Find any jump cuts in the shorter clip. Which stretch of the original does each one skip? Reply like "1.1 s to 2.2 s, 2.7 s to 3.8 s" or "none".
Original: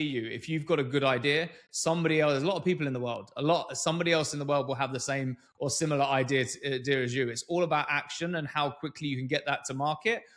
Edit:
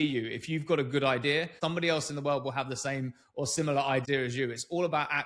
1.5 s to 3.8 s, 6.3 s to 6.8 s